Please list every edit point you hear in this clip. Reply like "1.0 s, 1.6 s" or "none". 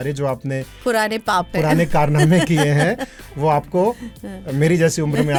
none